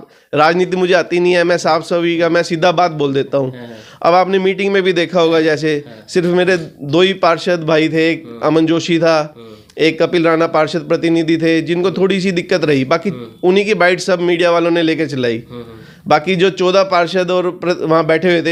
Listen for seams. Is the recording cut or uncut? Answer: uncut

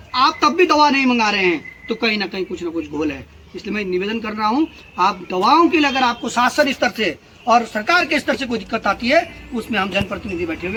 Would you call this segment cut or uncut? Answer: uncut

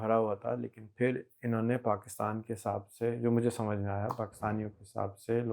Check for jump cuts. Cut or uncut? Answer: uncut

